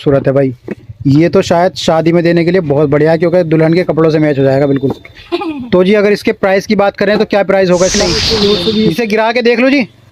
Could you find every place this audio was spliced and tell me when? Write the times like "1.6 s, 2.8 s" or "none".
8.9 s